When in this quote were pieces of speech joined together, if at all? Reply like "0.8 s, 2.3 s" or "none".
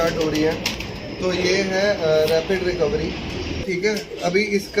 3.6 s